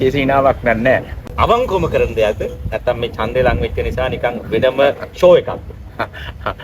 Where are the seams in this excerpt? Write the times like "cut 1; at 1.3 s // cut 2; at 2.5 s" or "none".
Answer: cut 1; at 1.1 s

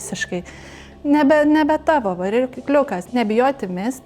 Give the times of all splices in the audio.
cut 1; at 3.1 s

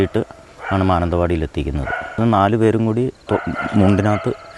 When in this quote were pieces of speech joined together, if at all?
cut 1; at 2.2 s

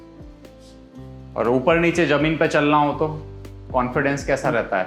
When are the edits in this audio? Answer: cut 1; at 1.3 s

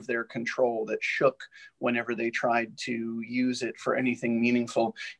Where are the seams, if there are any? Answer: none

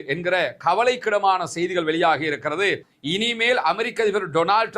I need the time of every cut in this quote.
cut 1; at 2.9 s

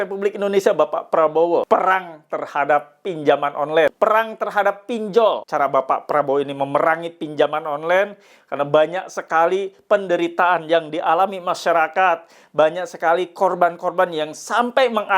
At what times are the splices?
cut 1; at 1.7 s // cut 2; at 3.9 s // cut 3; at 5.4 s

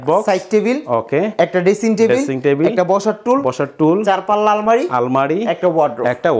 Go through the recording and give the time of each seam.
none

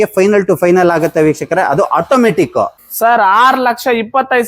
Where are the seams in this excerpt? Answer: cut 1; at 2.8 s

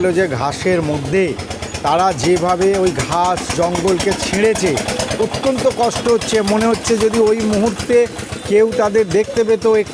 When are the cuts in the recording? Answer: none

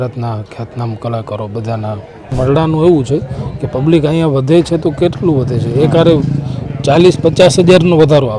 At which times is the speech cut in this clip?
cut 1; at 2.3 s

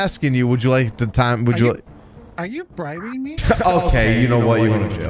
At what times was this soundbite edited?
none

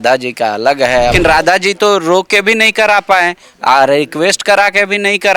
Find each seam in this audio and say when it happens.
cut 1; at 1.1 s

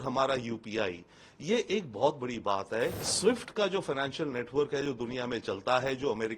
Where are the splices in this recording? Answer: cut 1; at 3.0 s

